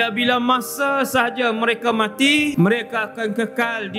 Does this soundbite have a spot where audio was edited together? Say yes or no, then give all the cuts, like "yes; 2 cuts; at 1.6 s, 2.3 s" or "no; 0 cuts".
yes; 1 cut; at 2.5 s